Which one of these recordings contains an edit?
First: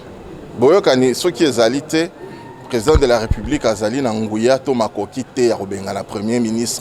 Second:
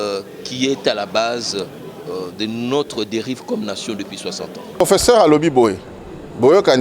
second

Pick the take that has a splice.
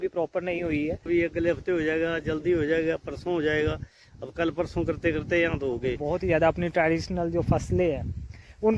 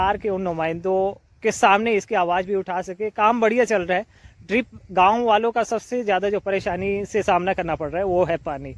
first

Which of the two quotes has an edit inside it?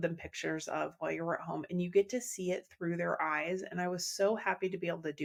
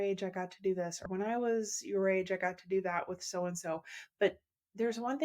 second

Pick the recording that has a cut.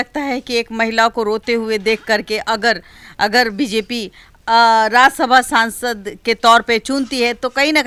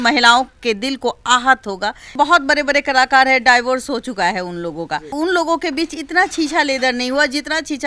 second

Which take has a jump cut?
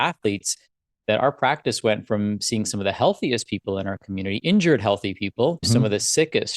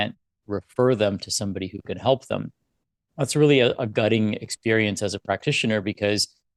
first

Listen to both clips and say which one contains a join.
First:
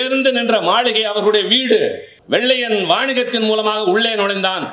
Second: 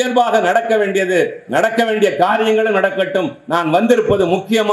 first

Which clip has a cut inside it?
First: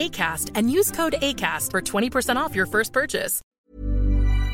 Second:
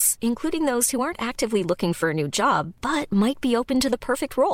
first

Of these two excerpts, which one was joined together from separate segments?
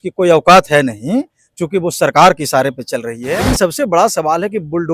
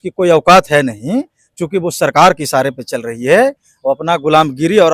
first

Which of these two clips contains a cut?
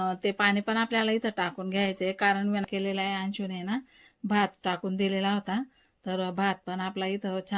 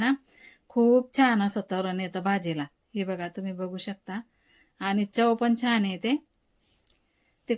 first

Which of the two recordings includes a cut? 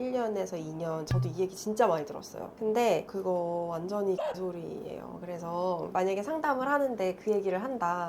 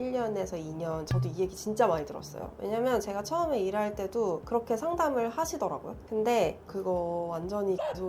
first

